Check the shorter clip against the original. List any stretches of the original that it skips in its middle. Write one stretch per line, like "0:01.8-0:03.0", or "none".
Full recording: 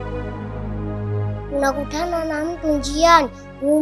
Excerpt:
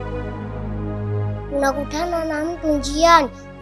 none